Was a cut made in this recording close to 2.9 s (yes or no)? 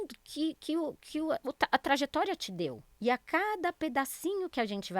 yes